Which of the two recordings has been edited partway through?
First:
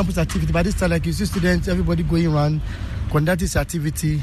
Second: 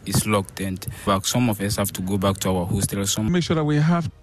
second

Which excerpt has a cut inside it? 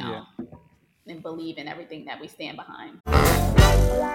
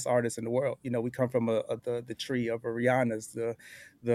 first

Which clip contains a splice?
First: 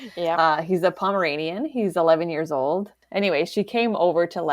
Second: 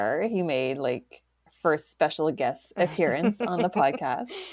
first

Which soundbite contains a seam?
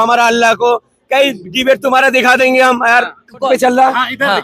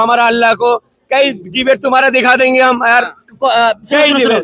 first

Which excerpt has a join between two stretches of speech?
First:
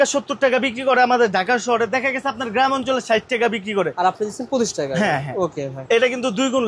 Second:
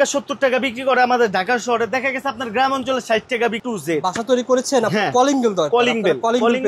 second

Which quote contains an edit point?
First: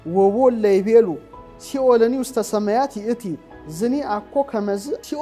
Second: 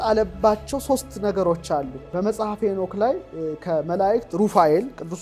second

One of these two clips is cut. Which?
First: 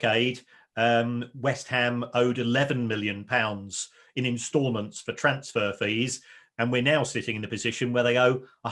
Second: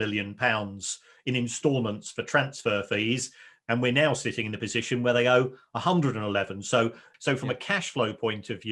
second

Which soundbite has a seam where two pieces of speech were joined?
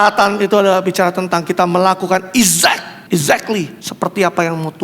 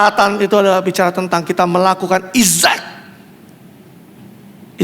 first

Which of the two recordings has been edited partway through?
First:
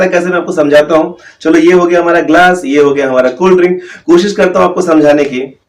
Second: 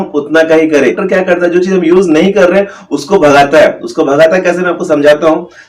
second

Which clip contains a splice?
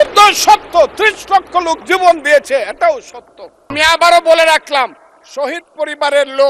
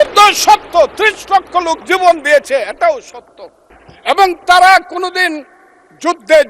first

